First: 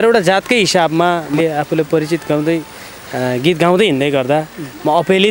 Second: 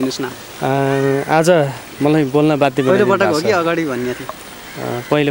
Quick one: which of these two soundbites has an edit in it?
first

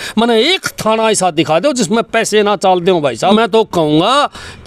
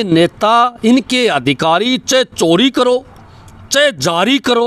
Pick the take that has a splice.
first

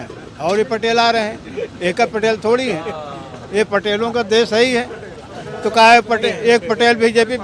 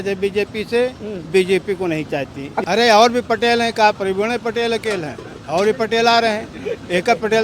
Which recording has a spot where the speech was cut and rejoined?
second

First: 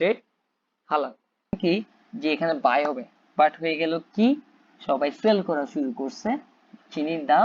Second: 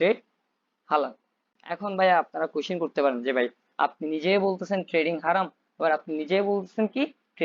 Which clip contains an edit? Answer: first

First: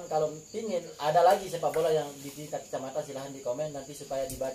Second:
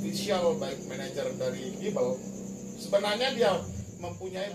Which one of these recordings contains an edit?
first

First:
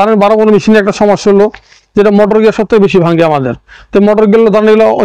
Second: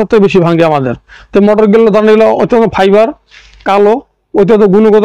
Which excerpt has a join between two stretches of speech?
second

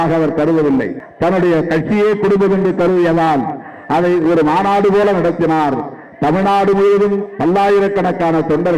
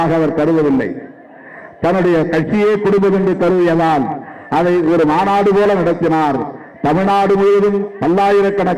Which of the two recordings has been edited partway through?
first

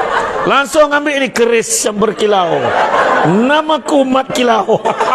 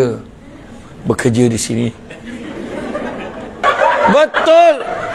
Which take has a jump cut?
second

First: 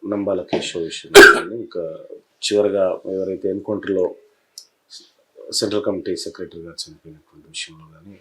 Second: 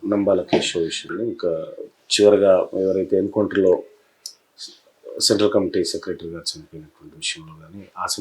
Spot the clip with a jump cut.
second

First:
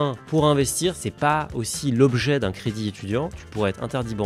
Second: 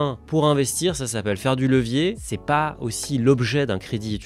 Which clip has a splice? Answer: first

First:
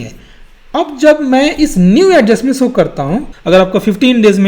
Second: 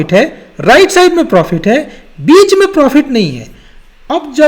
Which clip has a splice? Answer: first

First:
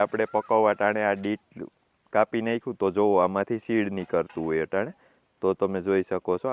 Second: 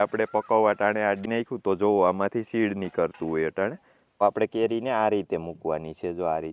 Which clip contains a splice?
second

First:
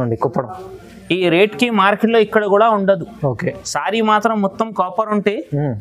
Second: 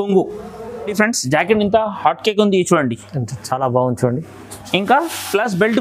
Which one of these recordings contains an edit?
second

